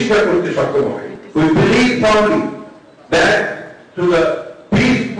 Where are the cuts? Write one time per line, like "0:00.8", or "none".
none